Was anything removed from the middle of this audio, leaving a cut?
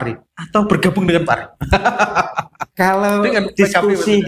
no; 0 cuts

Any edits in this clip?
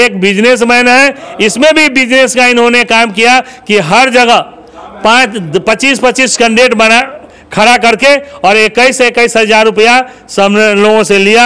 no; 0 cuts

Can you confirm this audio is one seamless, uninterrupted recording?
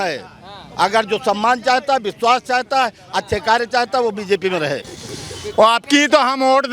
no; 1 cut; at 4.8 s

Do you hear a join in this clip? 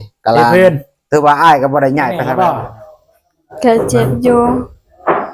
yes; 1 cut; at 2.2 s

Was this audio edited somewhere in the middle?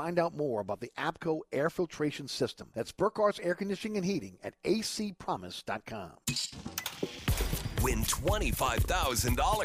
yes; 1 cut; at 6.1 s

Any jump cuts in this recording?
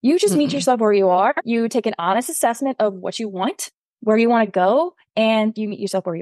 no; 0 cuts

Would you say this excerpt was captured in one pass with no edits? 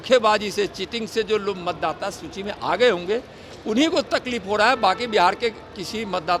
yes; 0 cuts

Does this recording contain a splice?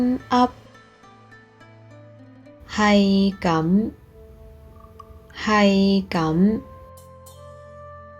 yes; 3 cuts; at 1.2 s, 2.7 s, 7.0 s

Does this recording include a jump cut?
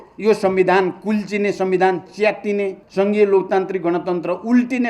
yes; 1 cut; at 2.8 s

